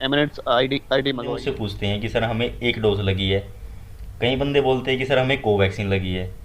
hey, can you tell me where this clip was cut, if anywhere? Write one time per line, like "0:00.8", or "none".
0:01.3